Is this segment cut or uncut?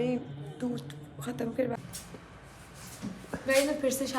cut